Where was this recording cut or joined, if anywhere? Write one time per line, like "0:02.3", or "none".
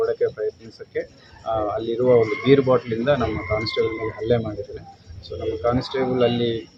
none